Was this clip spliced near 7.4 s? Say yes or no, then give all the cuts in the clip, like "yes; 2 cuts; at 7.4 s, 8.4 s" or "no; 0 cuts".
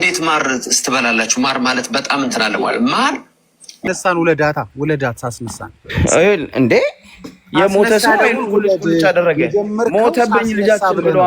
no; 1 cut; at 3.8 s